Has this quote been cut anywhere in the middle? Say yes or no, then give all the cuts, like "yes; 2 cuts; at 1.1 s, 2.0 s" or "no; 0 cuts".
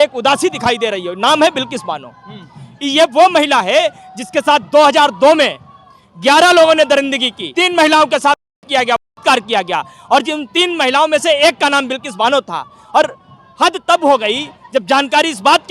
no; 0 cuts